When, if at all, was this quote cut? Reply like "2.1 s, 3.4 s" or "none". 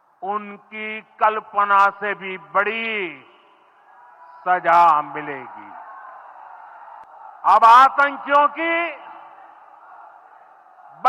7.0 s

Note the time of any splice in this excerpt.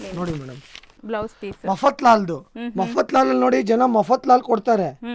1.0 s

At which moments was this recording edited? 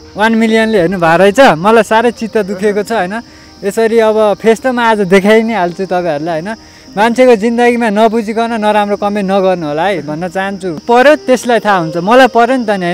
10.8 s

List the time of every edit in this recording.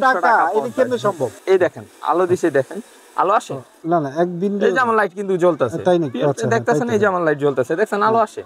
1.4 s

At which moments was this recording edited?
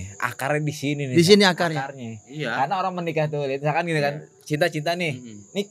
none

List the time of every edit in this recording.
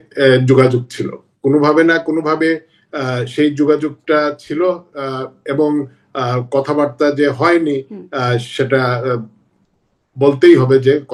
none

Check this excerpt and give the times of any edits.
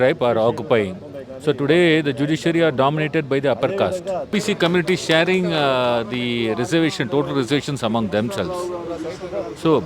4.3 s

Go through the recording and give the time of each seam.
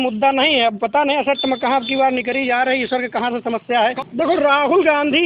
4.0 s

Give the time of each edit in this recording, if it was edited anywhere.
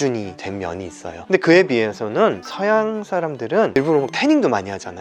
1.3 s, 3.8 s

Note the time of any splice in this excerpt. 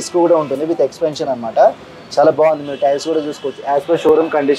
none

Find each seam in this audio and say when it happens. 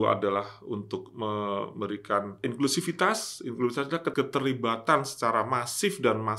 2.4 s, 4.1 s

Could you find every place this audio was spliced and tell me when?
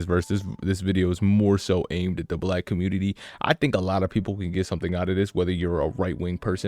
none

